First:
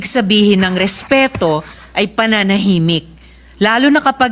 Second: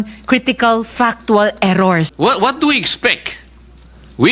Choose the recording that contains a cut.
second; 1 cut; at 2.1 s

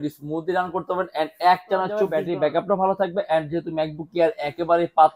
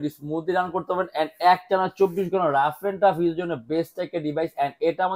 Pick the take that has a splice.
first; 1 cut; at 2.2 s

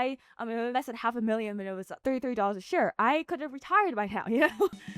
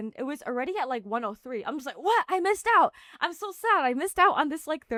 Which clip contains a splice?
first; 1 cut; at 2.0 s

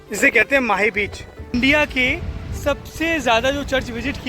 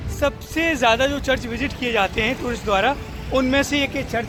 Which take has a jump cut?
first; 1 cut; at 1.5 s

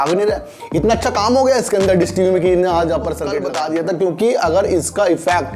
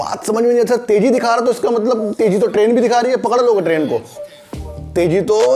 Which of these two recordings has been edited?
first; 1 cut; at 3.4 s

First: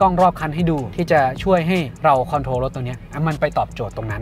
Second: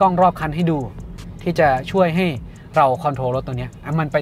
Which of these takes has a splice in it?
first; 2 cuts; at 0.9 s, 1.9 s

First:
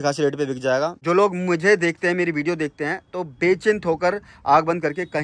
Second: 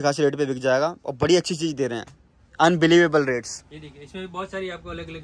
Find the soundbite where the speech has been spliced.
first; 1 cut; at 1.0 s

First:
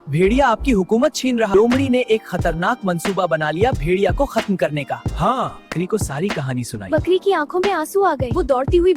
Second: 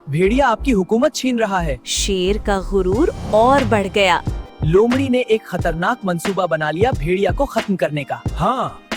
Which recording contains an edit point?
first; 2 cuts; at 1.5 s, 5.7 s

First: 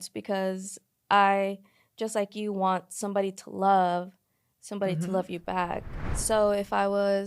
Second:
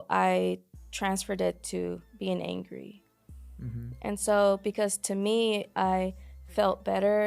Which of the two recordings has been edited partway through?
first; 1 cut; at 6.1 s

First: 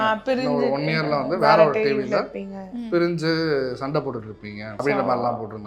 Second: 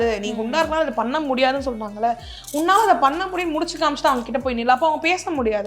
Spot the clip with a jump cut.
first; 1 cut; at 4.7 s

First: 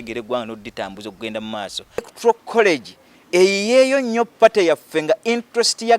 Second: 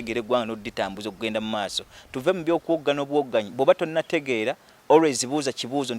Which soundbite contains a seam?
first; 1 cut; at 2.1 s

